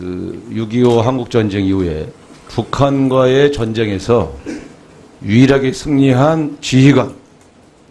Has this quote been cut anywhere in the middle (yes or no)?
no